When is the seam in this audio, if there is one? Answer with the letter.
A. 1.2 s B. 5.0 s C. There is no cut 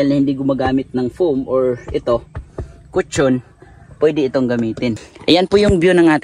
B